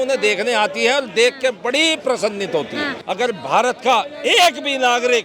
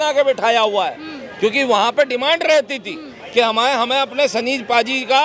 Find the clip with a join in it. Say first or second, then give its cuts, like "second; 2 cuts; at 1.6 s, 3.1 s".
first; 1 cut; at 3.0 s